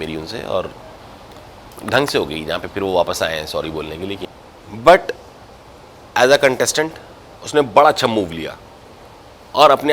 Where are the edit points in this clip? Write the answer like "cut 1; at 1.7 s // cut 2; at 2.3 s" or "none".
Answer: cut 1; at 4.2 s